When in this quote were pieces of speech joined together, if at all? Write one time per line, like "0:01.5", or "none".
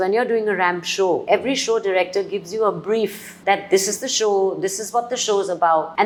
none